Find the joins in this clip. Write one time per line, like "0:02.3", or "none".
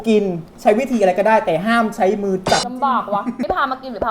0:02.7